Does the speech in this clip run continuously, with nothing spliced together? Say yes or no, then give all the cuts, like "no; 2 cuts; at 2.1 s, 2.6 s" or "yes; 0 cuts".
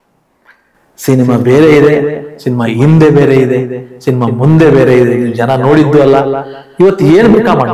yes; 0 cuts